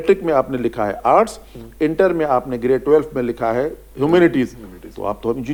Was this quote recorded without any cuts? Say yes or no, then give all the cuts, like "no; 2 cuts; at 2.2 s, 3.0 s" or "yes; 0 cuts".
yes; 0 cuts